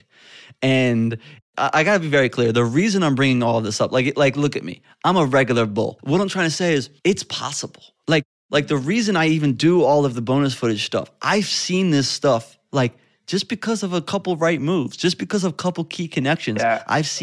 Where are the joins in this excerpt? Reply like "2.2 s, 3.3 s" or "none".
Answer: 1.4 s, 5.9 s, 6.9 s

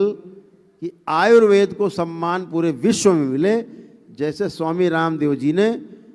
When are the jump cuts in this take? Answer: none

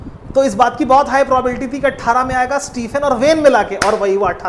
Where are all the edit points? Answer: none

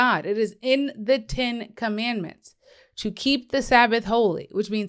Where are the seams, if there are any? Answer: none

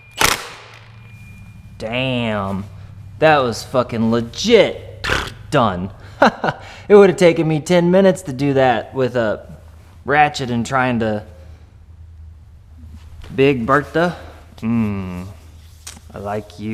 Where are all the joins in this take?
none

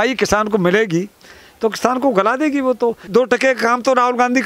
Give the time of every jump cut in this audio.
3.1 s

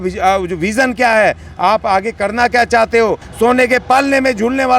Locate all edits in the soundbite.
3.3 s

